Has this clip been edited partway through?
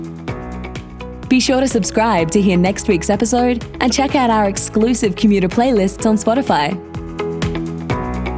yes; 2 cuts; at 1.2 s, 6.9 s

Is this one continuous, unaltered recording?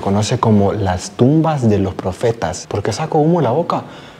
no; 1 cut; at 2.6 s

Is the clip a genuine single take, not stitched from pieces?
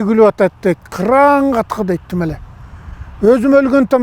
yes; 0 cuts

